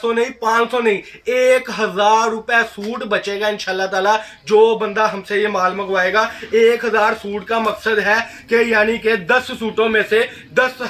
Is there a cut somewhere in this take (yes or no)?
no